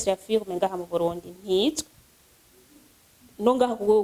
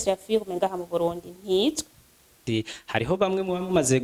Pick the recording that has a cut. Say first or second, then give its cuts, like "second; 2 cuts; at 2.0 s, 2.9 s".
second; 1 cut; at 2.4 s